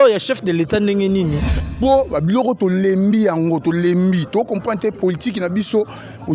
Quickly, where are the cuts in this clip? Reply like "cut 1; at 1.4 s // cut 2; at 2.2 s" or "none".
cut 1; at 1.5 s

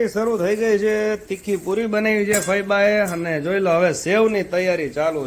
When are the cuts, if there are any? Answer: none

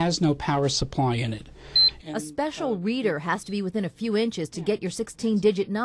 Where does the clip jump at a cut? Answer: cut 1; at 1.9 s

